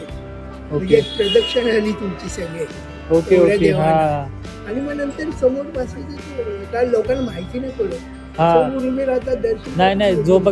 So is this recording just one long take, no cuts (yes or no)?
yes